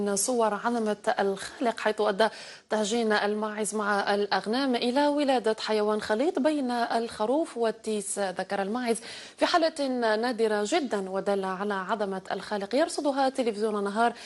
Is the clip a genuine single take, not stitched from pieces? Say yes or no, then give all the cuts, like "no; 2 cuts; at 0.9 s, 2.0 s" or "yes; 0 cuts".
yes; 0 cuts